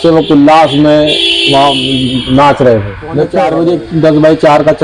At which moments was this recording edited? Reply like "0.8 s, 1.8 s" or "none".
3.3 s